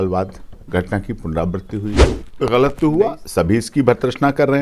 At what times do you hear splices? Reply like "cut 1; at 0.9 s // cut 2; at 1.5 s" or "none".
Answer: cut 1; at 2.0 s